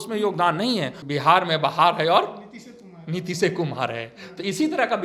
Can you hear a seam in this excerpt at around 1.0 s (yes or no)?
yes